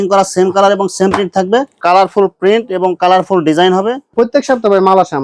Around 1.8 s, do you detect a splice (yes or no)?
yes